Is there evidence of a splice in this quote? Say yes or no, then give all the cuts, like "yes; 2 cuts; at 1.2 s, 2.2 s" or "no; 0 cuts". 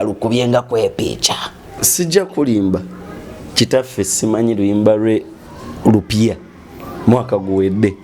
yes; 1 cut; at 1.8 s